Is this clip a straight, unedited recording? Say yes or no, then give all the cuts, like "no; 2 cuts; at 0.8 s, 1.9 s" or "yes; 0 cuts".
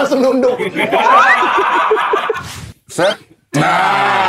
no; 1 cut; at 2.6 s